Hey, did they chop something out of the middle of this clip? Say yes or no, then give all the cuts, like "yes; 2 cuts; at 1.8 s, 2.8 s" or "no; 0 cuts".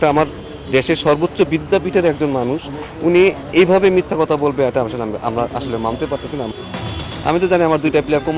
yes; 1 cut; at 6.9 s